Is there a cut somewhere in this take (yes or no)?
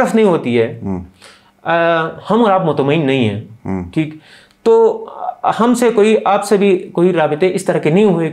no